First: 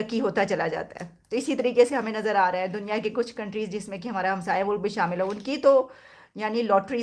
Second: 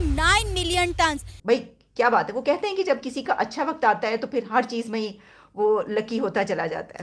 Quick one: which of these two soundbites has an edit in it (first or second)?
second